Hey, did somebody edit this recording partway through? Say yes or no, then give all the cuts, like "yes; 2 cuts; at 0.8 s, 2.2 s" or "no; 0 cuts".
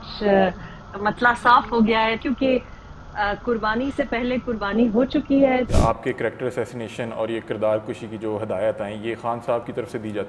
yes; 2 cuts; at 2.2 s, 5.7 s